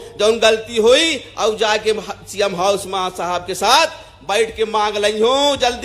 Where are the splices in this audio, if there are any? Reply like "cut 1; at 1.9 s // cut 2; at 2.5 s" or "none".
none